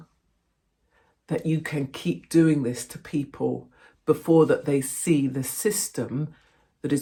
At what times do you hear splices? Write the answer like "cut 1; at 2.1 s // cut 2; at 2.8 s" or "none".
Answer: none